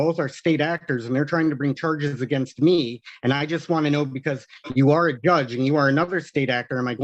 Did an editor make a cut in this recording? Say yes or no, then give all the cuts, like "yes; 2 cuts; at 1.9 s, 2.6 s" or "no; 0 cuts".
no; 0 cuts